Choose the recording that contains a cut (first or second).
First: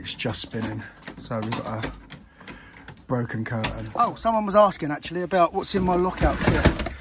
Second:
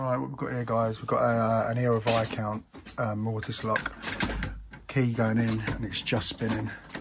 first